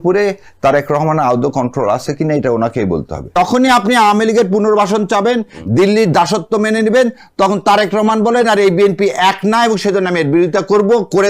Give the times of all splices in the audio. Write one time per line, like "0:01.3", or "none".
0:03.4